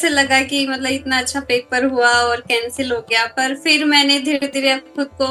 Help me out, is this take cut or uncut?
uncut